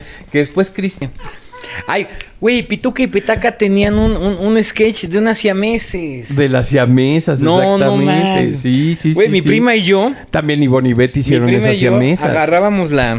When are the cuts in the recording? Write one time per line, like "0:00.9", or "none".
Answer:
0:01.0